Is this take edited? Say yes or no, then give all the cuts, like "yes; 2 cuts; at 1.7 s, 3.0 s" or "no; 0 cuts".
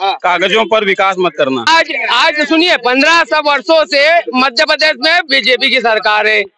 yes; 1 cut; at 1.7 s